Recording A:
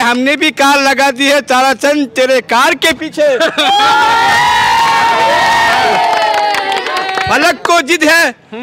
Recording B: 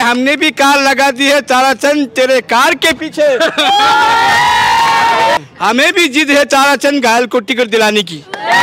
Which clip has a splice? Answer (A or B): B